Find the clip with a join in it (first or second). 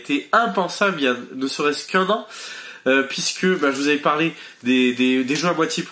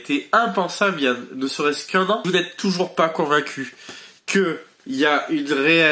second